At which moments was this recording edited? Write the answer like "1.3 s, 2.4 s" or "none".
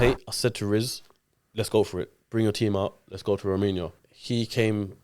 3.9 s